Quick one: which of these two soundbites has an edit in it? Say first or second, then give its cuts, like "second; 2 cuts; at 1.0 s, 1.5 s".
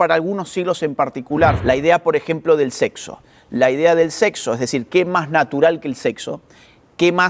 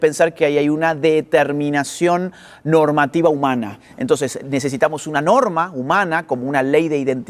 first; 1 cut; at 1.6 s